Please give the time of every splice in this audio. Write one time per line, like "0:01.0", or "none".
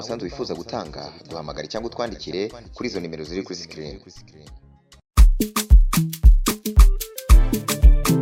none